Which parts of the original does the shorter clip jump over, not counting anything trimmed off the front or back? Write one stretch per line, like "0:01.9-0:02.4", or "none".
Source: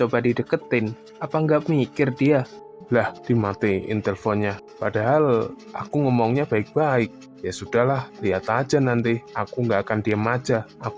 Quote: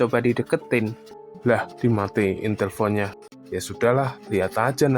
0:01.1-0:02.6
0:04.7-0:07.2